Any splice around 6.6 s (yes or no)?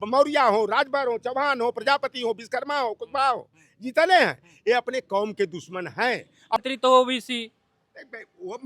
yes